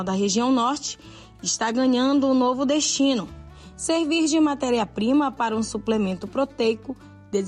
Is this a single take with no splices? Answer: yes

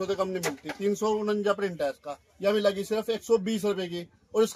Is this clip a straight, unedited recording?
yes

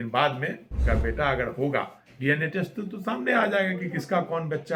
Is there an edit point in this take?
no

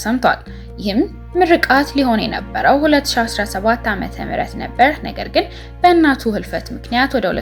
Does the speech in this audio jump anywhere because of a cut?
no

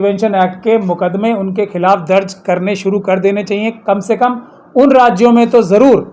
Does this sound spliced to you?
no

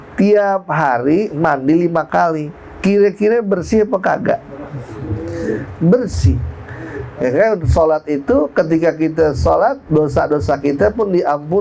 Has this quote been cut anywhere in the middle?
no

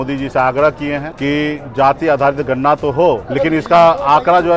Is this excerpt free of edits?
no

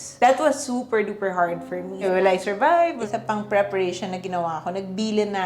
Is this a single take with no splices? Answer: no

